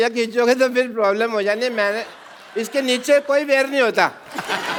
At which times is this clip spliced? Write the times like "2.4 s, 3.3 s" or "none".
none